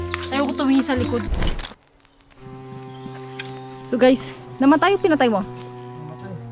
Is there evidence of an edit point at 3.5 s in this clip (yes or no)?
no